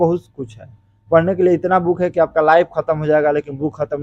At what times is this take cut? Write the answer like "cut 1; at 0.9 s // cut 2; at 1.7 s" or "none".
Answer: none